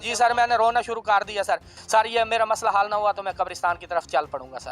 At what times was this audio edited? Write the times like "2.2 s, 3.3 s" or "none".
1.7 s